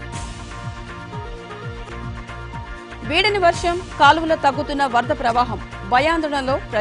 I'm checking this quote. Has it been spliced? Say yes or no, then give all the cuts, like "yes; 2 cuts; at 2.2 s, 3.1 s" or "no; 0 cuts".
yes; 1 cut; at 1.9 s